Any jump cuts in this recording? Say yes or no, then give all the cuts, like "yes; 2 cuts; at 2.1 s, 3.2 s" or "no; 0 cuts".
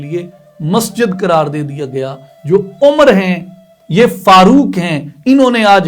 yes; 1 cut; at 2.3 s